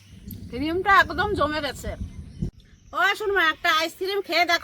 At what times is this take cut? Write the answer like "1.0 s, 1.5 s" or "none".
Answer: 2.5 s